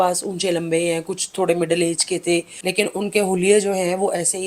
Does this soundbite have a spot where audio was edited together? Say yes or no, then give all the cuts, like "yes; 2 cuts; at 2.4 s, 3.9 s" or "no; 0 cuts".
yes; 1 cut; at 2.5 s